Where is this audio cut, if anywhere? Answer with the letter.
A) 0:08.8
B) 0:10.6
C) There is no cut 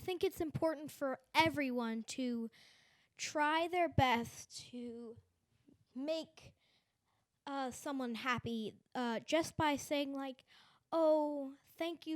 C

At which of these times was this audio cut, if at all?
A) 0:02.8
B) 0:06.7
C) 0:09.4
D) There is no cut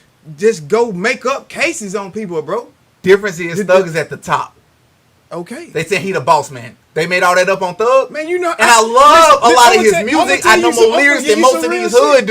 A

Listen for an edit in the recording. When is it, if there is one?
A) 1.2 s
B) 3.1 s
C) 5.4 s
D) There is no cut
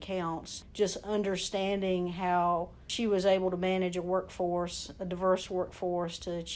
D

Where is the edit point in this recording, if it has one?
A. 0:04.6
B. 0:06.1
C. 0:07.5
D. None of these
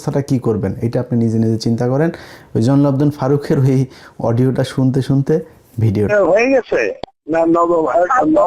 B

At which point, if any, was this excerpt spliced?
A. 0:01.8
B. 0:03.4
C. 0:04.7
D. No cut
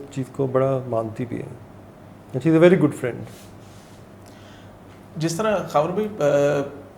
D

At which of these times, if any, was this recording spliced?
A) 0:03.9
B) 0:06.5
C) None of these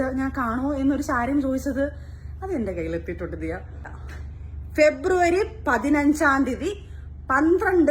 A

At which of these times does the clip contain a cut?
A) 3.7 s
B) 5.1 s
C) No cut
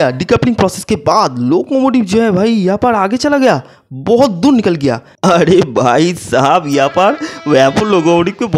B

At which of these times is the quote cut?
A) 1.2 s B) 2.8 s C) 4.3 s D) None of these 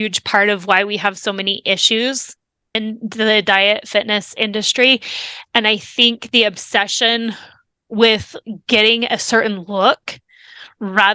B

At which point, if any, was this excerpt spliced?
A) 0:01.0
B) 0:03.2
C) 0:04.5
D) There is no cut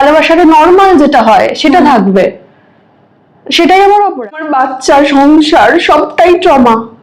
C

